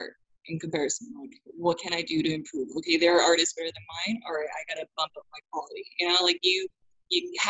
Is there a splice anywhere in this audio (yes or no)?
no